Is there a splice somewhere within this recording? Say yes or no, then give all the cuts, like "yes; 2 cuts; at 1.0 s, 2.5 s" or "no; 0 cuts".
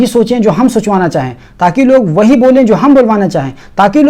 no; 0 cuts